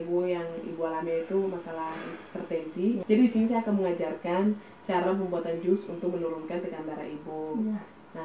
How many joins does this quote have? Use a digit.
1